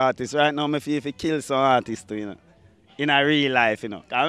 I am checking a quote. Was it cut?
no; 0 cuts

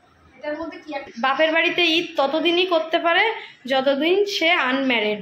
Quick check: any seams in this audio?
yes; 1 cut; at 1.0 s

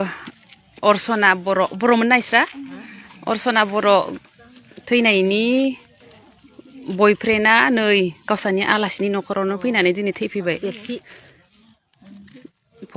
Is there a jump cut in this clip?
no; 0 cuts

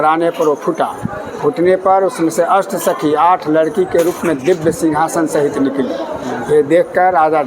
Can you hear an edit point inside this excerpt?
no; 0 cuts

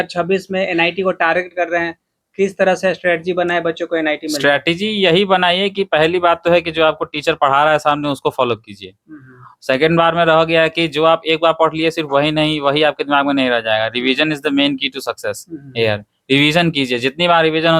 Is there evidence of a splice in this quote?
no; 0 cuts

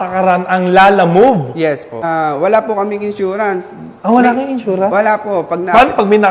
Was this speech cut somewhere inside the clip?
yes; 1 cut; at 2.1 s

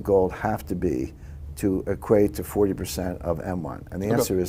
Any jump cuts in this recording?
no; 0 cuts

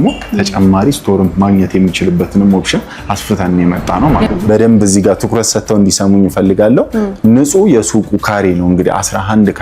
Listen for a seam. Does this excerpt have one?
yes; 1 cut; at 4.3 s

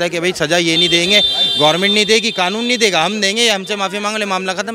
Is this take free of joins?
yes; 0 cuts

